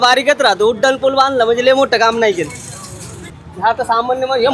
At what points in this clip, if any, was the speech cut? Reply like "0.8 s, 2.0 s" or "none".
3.4 s